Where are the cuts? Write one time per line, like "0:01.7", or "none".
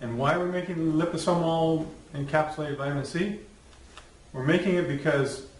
0:02.8